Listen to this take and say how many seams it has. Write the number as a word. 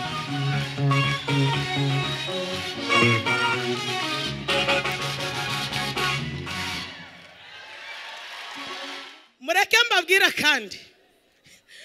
one